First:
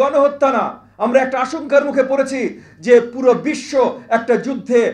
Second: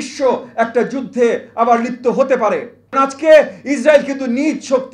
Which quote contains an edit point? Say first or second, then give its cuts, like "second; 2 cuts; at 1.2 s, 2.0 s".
second; 1 cut; at 2.9 s